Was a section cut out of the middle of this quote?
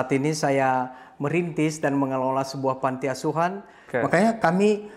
yes; 1 cut; at 3.7 s

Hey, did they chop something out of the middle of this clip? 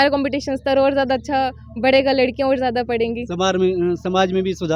no; 0 cuts

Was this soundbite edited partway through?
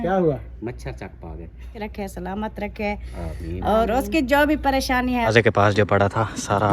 yes; 2 cuts; at 1.7 s, 5.3 s

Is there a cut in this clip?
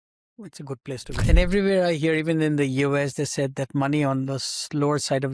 yes; 1 cut; at 1.2 s

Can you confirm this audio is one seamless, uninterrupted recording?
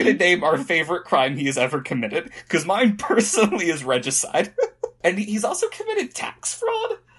no; 1 cut; at 5.0 s

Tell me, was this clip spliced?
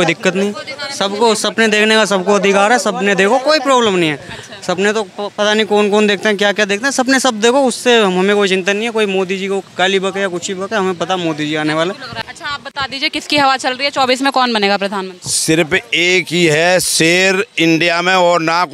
yes; 1 cut; at 12.1 s

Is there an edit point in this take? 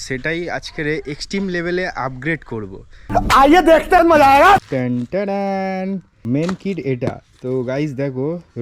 yes; 2 cuts; at 4.7 s, 6.2 s

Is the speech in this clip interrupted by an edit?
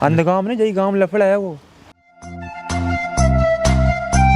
no; 0 cuts

